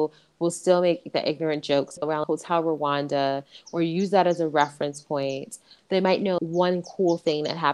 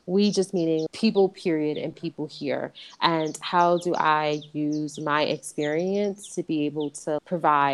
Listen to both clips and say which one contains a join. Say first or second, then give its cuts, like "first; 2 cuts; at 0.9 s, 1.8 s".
first; 2 cuts; at 2.0 s, 5.7 s